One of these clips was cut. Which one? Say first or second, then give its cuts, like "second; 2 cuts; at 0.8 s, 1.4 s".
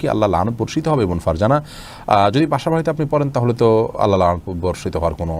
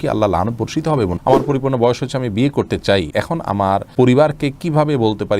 second; 2 cuts; at 1.2 s, 3.5 s